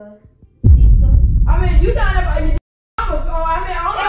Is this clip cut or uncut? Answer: uncut